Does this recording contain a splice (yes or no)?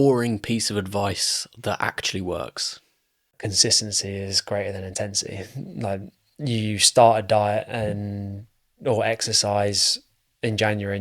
yes